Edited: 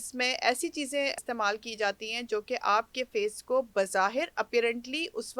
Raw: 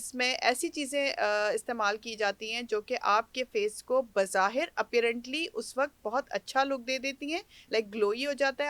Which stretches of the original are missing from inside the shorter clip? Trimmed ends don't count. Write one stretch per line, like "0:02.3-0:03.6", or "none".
0:01.2-0:01.6